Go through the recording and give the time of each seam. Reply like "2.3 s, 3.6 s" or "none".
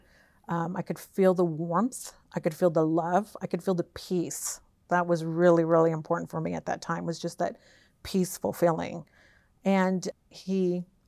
10.1 s